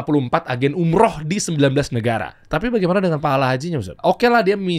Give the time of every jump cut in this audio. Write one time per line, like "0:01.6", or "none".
0:02.4
0:03.9